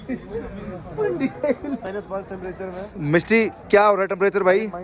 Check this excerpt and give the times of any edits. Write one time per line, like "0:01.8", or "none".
0:01.8